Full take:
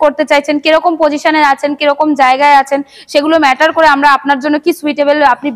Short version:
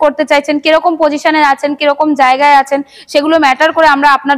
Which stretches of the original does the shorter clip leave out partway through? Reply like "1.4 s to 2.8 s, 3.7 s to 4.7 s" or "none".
none

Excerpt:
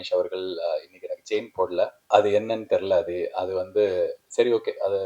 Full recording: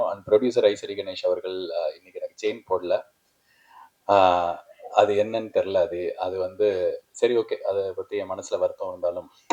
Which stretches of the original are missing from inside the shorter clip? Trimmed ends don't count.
3.1 s to 4.8 s

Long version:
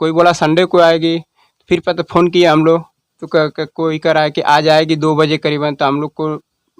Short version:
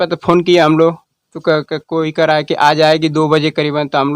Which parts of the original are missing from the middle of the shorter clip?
none

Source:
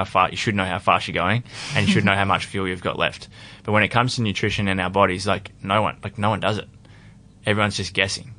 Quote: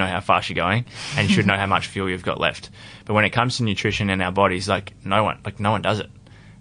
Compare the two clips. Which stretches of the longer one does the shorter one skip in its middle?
none

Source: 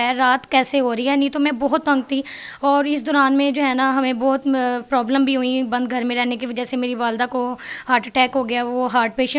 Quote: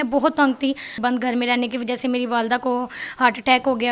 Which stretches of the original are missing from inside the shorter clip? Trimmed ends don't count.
2.5 s to 5.7 s

